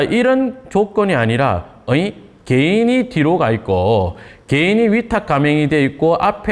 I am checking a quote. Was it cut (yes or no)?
no